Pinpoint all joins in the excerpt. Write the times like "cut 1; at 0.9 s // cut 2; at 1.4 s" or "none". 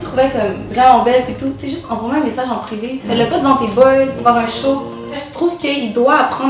cut 1; at 5.3 s